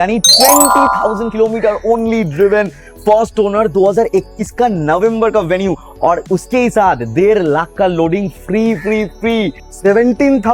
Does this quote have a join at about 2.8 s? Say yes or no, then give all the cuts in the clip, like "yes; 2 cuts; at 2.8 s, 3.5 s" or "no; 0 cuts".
no; 1 cut; at 9.6 s